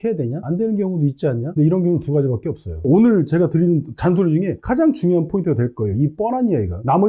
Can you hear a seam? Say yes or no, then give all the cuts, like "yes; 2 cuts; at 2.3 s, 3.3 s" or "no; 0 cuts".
yes; 2 cuts; at 1.5 s, 2.8 s